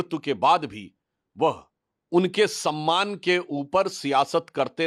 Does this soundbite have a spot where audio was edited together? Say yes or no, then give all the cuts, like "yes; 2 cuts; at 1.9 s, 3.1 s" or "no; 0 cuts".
no; 0 cuts